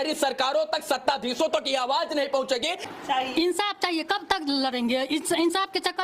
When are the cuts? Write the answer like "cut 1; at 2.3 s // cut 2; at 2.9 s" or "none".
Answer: cut 1; at 2.8 s